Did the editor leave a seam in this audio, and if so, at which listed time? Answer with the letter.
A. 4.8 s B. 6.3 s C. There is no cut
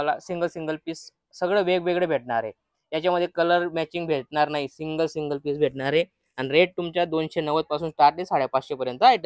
C